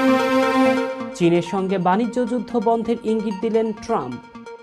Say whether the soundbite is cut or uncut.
uncut